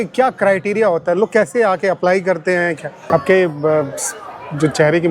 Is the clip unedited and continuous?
no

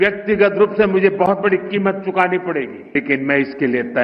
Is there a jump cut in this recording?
yes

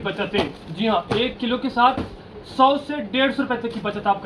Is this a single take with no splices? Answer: yes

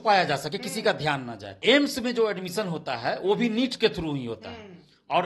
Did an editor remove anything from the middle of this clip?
yes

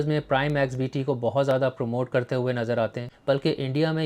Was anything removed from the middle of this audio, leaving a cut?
yes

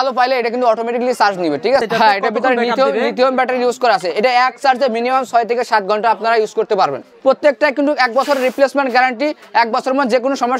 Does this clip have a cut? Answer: yes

